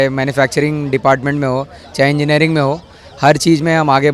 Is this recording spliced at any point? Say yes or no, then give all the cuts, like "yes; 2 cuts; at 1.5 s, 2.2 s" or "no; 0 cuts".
no; 0 cuts